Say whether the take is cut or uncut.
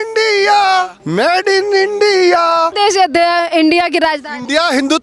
cut